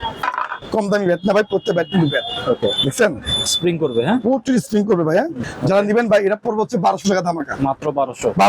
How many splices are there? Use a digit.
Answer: 1